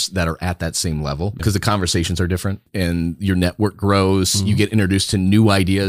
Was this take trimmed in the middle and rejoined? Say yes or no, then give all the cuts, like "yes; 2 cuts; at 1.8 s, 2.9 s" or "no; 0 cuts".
yes; 2 cuts; at 1.4 s, 2.7 s